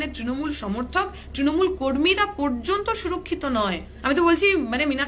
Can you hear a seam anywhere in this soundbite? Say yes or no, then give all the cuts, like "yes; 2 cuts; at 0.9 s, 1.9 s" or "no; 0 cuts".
yes; 1 cut; at 3.9 s